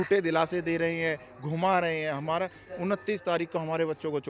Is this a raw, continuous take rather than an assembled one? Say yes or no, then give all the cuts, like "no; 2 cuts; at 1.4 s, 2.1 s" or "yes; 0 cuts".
yes; 0 cuts